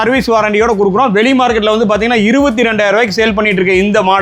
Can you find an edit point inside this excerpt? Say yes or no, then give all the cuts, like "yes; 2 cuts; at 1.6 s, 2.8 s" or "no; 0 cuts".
no; 0 cuts